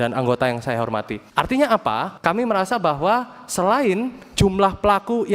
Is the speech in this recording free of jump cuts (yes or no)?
no